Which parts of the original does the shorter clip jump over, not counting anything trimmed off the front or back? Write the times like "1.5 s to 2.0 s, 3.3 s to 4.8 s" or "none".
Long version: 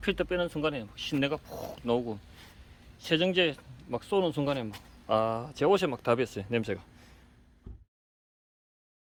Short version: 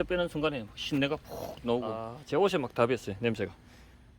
2.3 s to 5.4 s